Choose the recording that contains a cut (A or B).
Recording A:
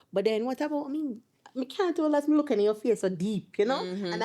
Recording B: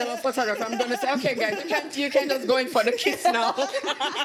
A